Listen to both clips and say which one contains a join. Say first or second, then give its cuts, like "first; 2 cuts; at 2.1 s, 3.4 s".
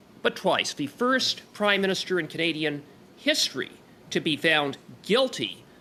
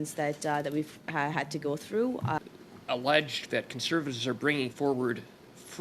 second; 1 cut; at 2.4 s